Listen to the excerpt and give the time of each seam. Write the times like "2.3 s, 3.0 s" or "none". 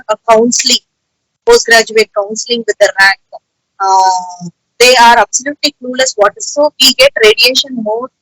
6.5 s